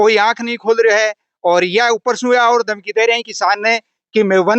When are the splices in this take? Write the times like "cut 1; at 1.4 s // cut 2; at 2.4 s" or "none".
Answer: none

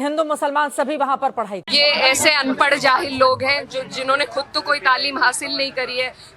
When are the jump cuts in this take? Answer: cut 1; at 1.5 s

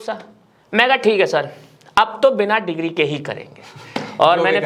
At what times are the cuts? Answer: none

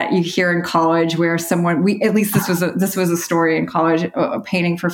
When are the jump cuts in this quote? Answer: none

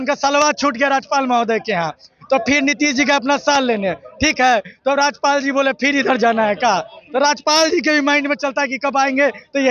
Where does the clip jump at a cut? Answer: none

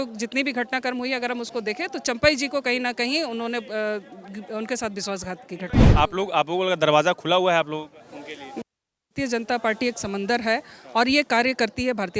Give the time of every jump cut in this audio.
cut 1; at 5.9 s

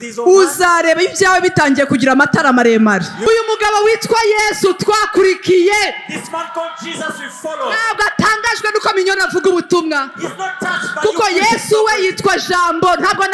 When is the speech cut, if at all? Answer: cut 1; at 3.3 s

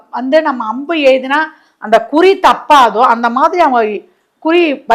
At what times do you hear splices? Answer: none

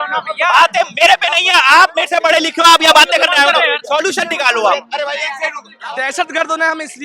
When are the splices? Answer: cut 1; at 5.7 s

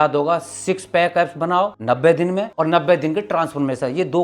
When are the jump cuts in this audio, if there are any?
cut 1; at 1.8 s // cut 2; at 2.5 s

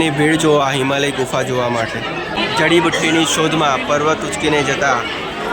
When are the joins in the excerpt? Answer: cut 1; at 2.2 s

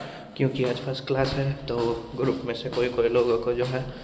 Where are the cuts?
none

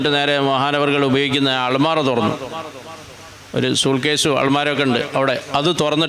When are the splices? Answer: none

